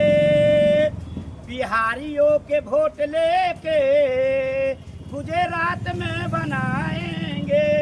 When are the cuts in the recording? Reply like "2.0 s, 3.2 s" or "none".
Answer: none